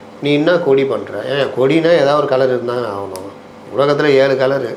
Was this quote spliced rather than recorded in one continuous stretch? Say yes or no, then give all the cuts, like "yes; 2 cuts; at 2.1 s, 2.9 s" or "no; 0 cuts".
no; 0 cuts